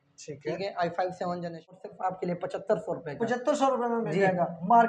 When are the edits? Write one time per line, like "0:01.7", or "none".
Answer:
0:01.8